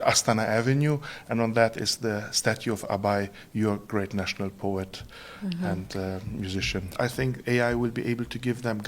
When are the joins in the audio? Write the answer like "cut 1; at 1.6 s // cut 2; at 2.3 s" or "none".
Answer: cut 1; at 6.9 s